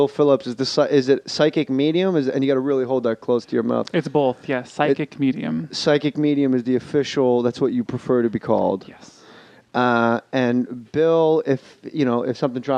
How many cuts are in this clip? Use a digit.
1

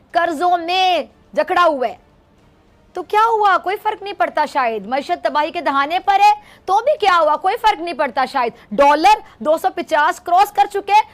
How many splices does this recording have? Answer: 0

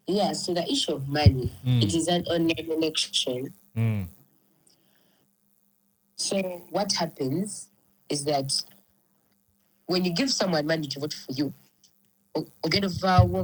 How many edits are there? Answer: 0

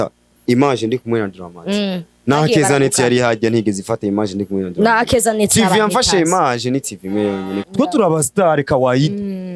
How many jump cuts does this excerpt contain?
1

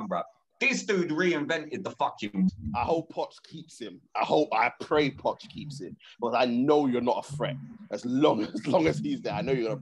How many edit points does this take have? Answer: 1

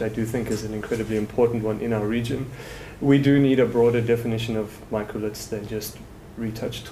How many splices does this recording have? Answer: 1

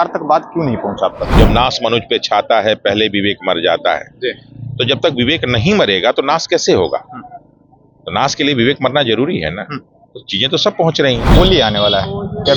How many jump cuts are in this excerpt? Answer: 2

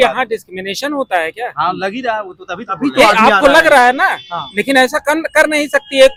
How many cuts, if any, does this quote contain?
0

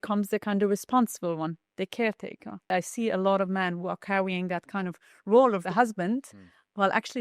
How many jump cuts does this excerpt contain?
2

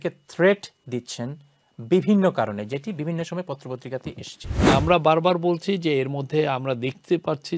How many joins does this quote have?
1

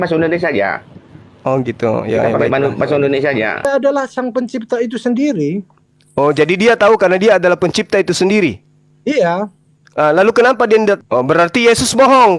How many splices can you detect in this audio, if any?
2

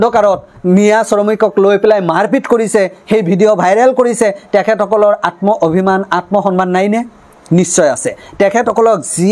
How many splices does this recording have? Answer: 0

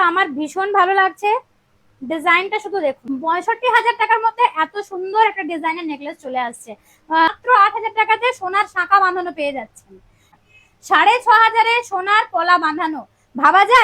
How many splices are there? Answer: 2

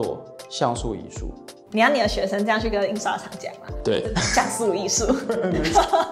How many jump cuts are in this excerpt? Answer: 0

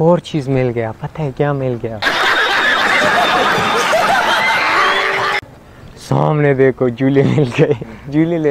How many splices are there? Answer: 3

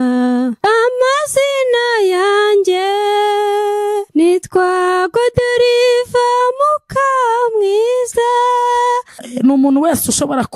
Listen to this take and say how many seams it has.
1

